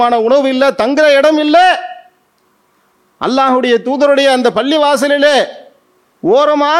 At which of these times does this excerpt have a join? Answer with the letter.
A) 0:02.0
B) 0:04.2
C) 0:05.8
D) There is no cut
D